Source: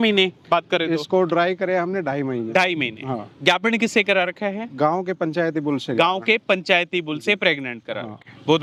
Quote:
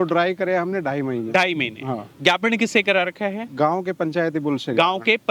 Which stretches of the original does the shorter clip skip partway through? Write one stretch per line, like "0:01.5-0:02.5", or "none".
none